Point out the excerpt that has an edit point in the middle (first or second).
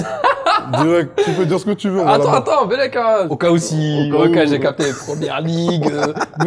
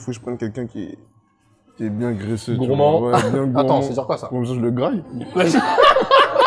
first